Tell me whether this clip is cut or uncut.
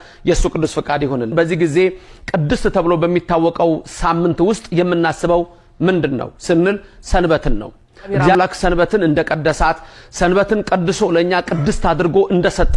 cut